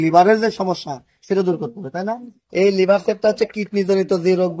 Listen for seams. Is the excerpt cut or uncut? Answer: cut